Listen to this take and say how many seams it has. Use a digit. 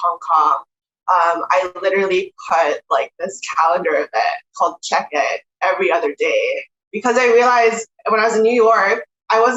0